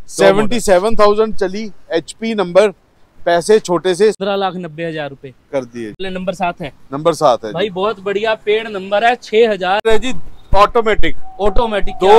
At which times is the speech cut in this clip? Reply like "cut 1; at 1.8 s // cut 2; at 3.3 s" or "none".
cut 1; at 4.2 s // cut 2; at 5.9 s // cut 3; at 9.8 s

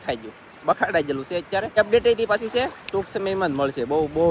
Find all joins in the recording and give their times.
cut 1; at 1.7 s

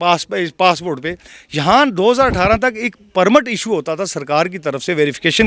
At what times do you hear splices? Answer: none

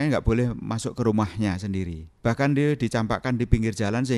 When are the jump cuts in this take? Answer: cut 1; at 2.0 s

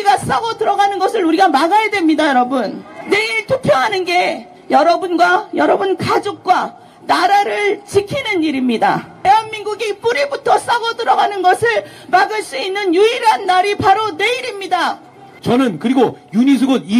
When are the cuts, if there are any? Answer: cut 1; at 2.9 s // cut 2; at 9.2 s // cut 3; at 15.3 s

